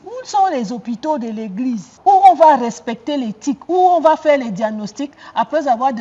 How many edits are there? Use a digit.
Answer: 1